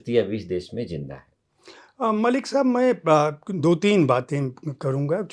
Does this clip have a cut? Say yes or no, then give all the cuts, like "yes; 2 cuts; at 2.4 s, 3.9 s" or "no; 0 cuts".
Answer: no; 0 cuts